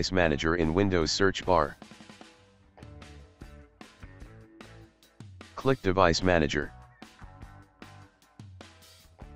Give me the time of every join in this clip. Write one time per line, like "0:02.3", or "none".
0:01.8
0:05.6
0:06.7